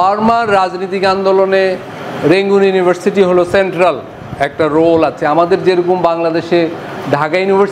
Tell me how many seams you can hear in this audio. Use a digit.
0